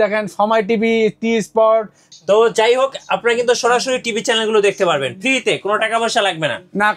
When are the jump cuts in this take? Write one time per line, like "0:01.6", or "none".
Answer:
none